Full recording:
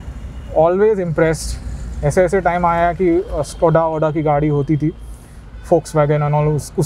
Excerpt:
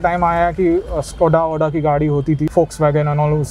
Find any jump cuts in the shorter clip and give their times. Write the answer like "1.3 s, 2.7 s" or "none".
2.5 s